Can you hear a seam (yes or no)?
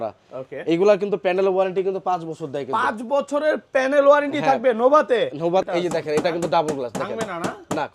yes